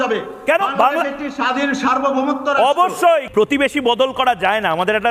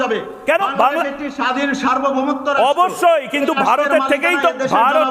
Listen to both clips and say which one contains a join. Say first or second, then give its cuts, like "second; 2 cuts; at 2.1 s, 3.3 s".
first; 1 cut; at 3.3 s